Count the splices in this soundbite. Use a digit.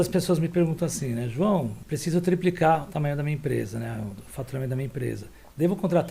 1